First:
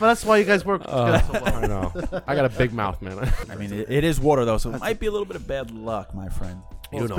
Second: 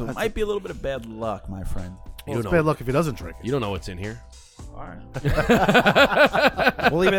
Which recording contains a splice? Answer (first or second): first